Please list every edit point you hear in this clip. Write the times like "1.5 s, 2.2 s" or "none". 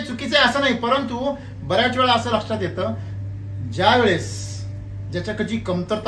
none